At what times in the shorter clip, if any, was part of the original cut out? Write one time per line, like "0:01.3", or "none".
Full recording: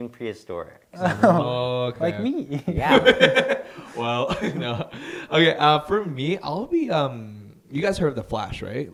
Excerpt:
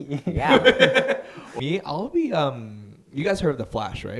0:01.5